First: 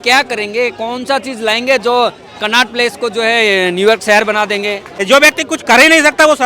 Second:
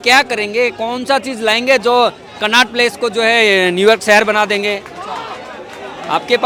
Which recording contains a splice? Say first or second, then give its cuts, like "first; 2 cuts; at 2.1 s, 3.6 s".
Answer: first; 1 cut; at 4.9 s